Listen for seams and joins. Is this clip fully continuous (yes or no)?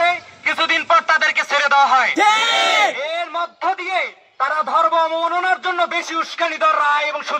yes